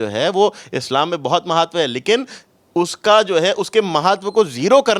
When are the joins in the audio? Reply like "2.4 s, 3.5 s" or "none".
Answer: none